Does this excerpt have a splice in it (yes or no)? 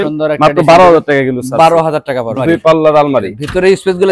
yes